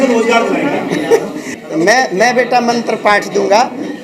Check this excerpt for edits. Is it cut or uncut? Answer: cut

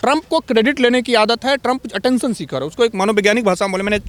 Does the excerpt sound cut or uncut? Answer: uncut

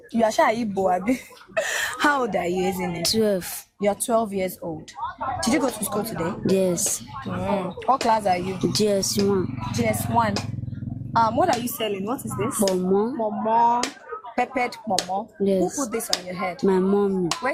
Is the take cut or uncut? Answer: uncut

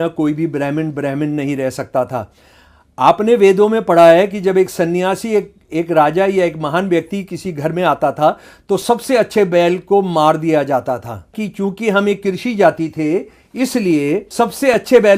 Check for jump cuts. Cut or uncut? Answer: cut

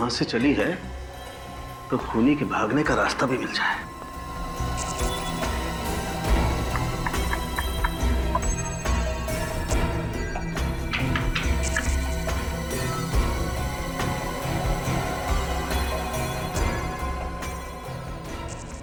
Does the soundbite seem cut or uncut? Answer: uncut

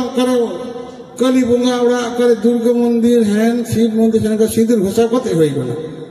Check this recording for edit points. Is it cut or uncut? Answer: uncut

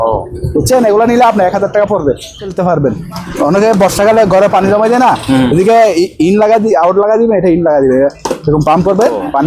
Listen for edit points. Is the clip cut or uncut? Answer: cut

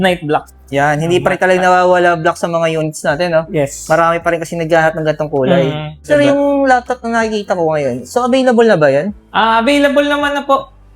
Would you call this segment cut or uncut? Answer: cut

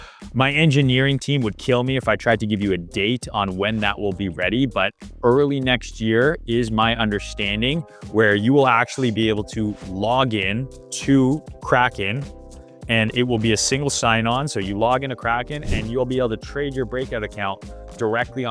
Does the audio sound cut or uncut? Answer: uncut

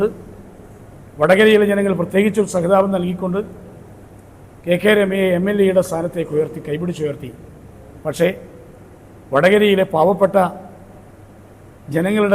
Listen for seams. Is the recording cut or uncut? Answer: uncut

